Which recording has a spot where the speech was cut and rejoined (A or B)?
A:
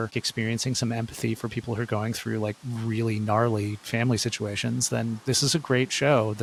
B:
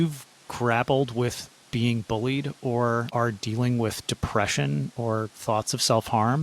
B